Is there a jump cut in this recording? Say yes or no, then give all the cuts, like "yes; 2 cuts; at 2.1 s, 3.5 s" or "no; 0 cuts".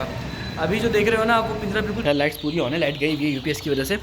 yes; 1 cut; at 2.0 s